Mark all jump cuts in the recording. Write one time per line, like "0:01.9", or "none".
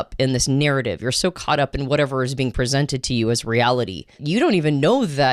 0:04.2